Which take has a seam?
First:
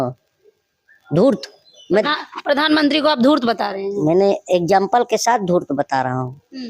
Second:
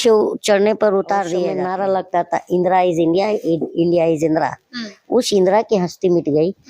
second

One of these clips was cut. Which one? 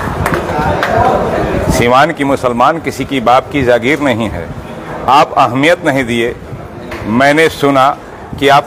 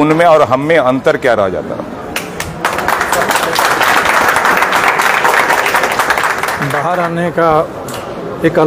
second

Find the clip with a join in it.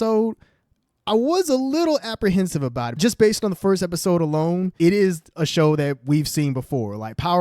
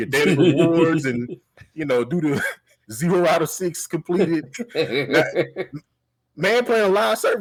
first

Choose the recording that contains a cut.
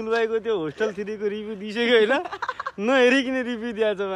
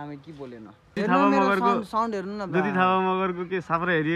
second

